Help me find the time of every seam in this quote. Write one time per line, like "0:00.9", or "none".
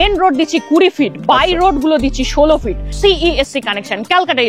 0:03.0